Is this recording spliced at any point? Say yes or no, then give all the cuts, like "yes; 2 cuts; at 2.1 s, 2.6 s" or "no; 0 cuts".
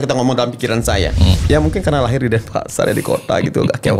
yes; 1 cut; at 1.4 s